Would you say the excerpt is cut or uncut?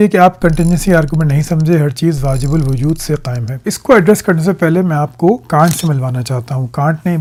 uncut